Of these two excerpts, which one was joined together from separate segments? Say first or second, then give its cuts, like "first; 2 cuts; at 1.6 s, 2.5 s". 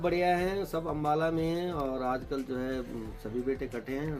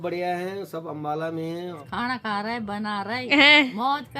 second; 1 cut; at 1.8 s